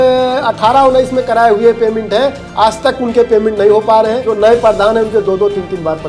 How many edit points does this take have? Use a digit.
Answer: 1